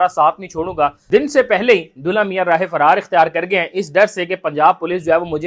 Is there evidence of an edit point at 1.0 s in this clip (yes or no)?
yes